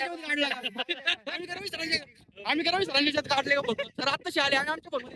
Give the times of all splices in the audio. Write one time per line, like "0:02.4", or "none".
none